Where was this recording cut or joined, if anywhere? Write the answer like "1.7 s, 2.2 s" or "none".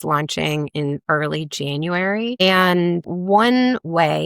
3.1 s